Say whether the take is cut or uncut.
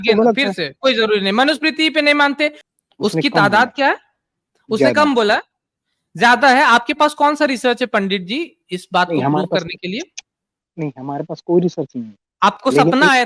cut